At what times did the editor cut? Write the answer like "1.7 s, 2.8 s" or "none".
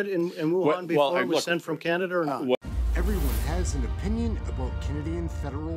2.6 s